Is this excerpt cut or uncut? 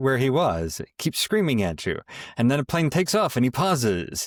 uncut